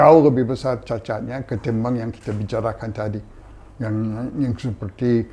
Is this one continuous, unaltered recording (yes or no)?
yes